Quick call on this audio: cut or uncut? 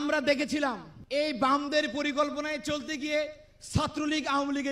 cut